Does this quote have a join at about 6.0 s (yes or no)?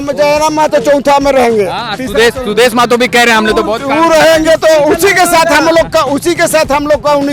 no